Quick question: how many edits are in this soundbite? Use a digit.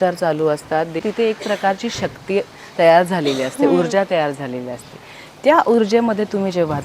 1